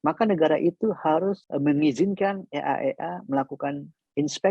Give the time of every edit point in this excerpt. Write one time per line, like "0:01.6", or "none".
0:01.4